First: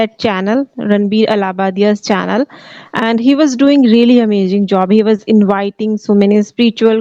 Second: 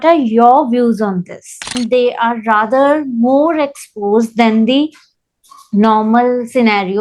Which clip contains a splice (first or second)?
second